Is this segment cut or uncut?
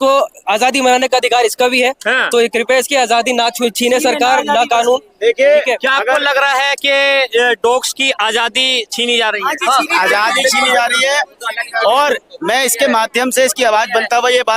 uncut